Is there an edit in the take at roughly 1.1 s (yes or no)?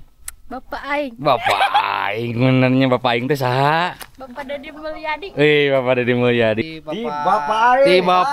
no